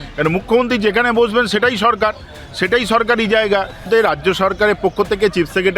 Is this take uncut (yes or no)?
no